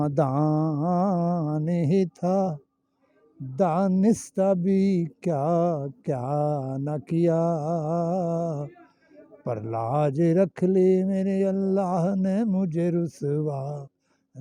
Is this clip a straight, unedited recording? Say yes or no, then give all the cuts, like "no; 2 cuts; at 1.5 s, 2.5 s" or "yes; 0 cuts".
yes; 0 cuts